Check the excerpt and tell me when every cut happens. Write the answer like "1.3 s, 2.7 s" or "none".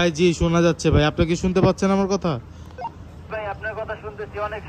none